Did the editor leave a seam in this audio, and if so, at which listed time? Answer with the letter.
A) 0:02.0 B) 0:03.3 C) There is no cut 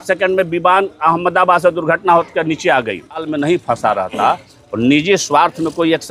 B